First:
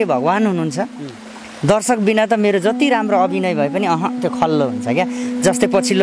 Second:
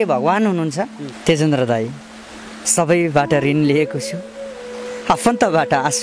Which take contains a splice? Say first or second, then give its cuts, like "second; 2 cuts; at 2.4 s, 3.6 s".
second; 1 cut; at 1.1 s